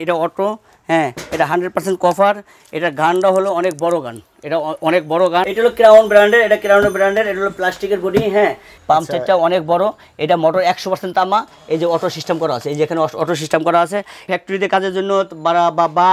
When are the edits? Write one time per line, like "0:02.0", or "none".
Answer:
0:05.5
0:08.7
0:14.2